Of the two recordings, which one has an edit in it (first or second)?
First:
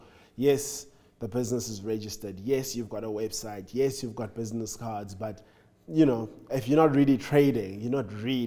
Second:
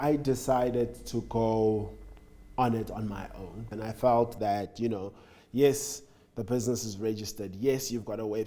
second